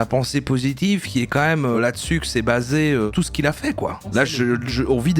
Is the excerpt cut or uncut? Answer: cut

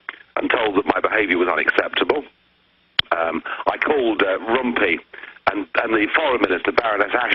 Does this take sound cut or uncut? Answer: uncut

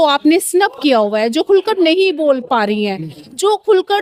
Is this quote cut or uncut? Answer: uncut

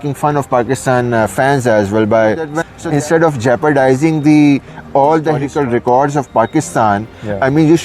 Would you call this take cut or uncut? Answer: cut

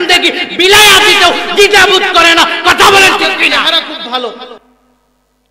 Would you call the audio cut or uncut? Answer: cut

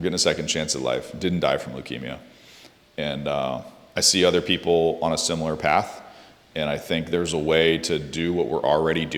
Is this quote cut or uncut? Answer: uncut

